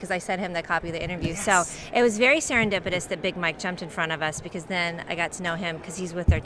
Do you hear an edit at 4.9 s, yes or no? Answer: no